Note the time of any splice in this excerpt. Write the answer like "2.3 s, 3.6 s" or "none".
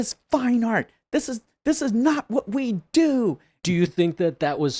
3.6 s